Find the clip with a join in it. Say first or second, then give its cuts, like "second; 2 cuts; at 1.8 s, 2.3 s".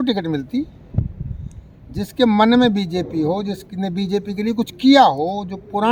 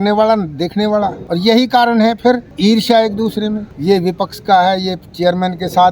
second; 3 cuts; at 1.2 s, 2.5 s, 3.7 s